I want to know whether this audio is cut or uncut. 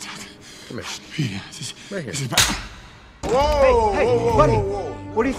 cut